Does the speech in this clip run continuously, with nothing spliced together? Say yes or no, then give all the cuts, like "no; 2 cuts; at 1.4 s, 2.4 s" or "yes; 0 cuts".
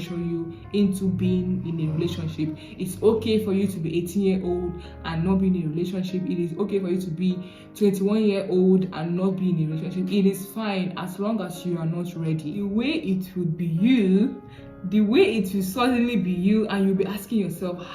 no; 1 cut; at 12.6 s